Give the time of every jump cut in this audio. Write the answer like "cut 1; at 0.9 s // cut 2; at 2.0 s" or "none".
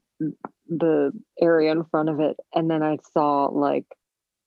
none